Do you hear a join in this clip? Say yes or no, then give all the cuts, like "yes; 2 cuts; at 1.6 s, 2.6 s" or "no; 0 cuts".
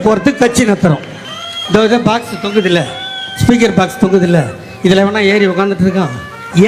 yes; 1 cut; at 1.1 s